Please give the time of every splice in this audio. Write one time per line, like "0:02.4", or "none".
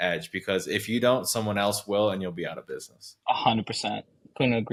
none